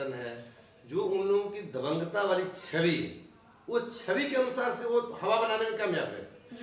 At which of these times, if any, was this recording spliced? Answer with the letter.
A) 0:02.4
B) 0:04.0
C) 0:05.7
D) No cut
D